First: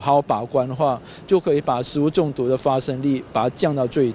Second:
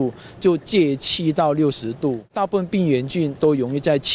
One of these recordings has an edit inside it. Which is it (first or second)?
second